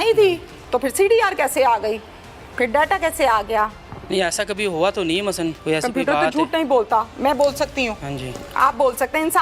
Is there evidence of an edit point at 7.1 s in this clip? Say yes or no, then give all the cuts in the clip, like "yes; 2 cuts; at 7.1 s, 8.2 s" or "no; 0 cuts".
no; 2 cuts; at 3.9 s, 5.6 s